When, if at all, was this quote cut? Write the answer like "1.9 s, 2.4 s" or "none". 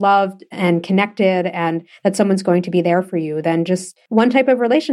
3.9 s